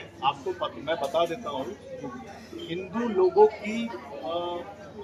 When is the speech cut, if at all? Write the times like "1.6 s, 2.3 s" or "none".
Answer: none